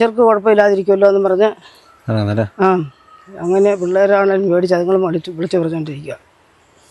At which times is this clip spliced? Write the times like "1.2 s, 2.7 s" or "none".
none